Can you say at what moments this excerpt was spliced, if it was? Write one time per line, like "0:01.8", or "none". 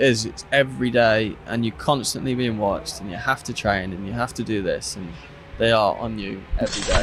none